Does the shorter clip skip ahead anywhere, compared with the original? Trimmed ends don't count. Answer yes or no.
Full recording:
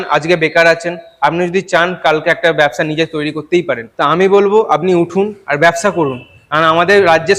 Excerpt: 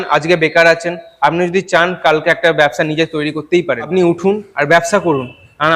yes